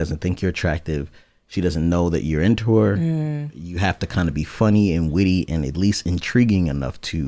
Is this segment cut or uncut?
uncut